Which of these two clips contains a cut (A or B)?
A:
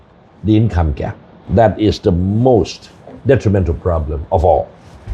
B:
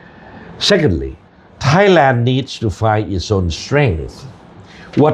A